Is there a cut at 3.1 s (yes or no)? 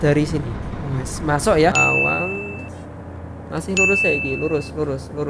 no